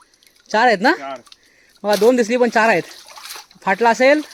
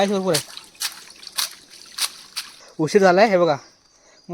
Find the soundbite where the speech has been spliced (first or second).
second